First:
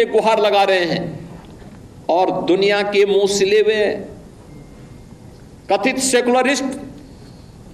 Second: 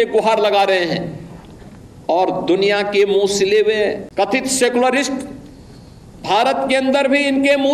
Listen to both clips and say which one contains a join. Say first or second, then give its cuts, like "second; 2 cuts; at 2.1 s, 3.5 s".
second; 1 cut; at 4.0 s